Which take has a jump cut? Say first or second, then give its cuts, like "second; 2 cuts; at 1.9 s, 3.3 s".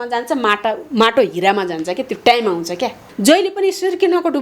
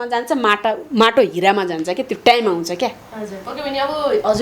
first; 1 cut; at 3.1 s